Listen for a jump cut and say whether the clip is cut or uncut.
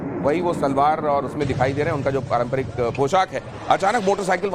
uncut